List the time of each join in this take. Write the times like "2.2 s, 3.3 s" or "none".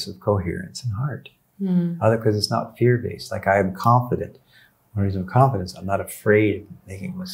none